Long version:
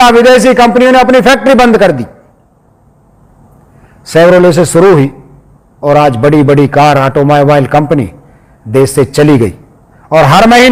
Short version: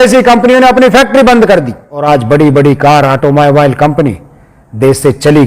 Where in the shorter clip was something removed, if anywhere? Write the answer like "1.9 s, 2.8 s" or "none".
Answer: 1.9 s